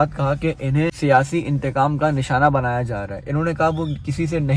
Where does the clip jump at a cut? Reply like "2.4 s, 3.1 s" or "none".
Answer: 1.0 s